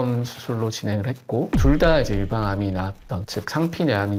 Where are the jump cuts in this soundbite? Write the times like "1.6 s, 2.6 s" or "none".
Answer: none